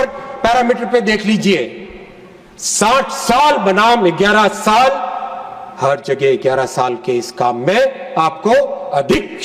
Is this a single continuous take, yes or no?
yes